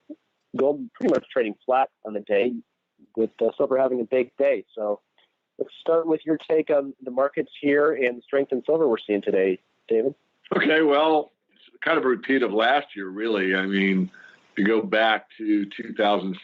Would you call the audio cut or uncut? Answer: uncut